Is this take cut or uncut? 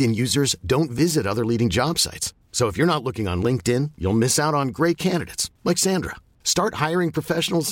uncut